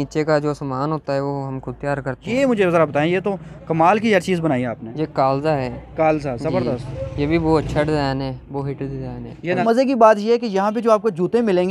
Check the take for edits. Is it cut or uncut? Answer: cut